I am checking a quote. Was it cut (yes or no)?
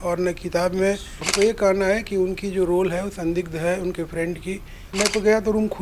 yes